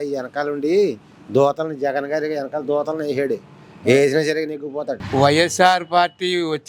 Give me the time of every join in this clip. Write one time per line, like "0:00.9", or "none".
0:05.0

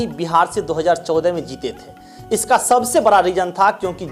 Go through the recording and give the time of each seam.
none

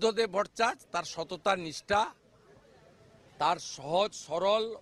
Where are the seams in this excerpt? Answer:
none

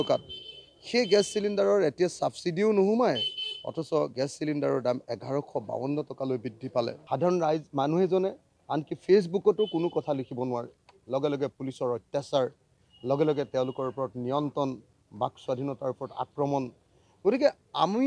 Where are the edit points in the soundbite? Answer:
0:07.0

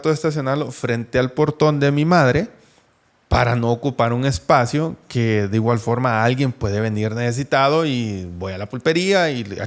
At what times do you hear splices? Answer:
none

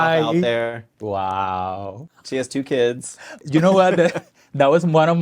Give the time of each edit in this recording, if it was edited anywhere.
0:00.9
0:02.0
0:03.4

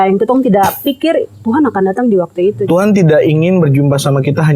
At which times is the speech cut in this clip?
0:02.6

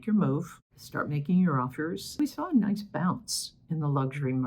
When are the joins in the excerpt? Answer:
0:02.2

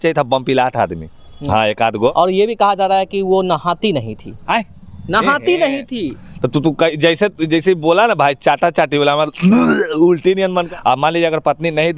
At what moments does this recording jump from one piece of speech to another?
0:02.1
0:10.7

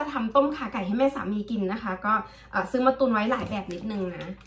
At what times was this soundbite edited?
none

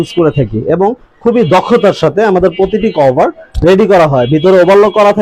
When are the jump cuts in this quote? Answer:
none

